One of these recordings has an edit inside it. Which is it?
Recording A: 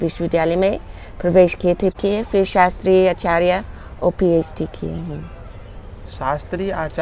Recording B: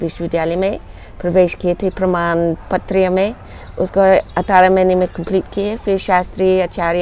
A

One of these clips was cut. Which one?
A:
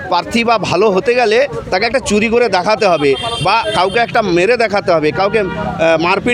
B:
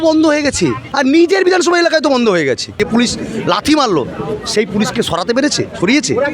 B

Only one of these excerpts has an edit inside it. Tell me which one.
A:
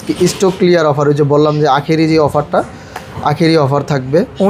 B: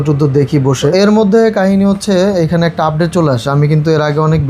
B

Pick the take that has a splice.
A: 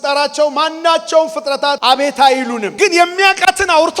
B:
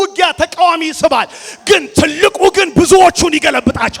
A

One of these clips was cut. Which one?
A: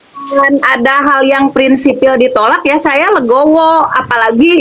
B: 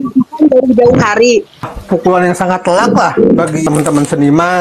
B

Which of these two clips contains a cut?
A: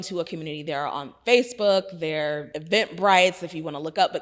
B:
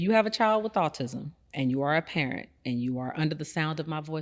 A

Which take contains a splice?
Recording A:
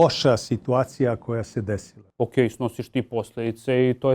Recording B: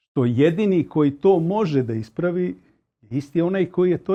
A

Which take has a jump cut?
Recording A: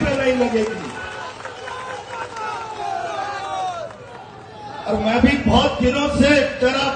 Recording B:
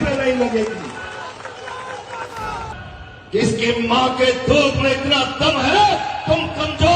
B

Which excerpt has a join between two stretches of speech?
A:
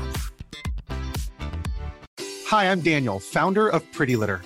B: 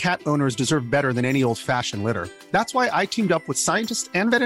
A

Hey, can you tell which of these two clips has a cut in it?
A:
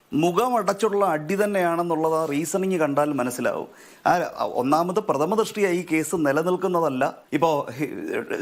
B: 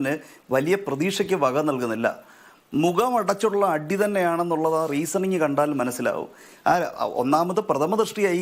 A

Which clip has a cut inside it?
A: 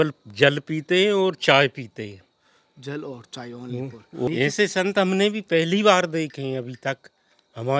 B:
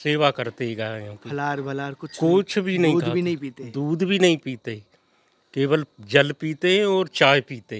A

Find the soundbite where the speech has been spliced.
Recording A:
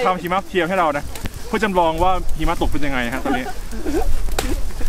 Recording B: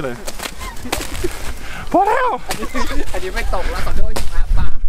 A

